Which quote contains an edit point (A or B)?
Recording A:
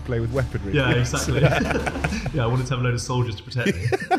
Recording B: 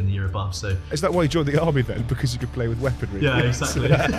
B